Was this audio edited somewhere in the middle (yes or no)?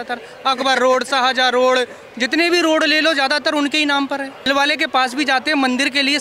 yes